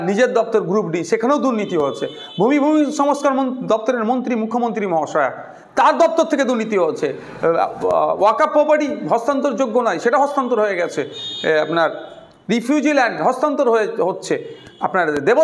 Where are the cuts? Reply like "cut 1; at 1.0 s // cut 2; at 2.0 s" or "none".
none